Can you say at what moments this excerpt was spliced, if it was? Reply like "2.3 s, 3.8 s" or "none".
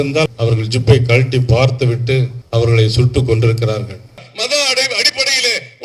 4.2 s